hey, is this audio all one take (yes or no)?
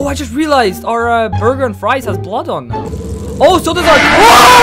yes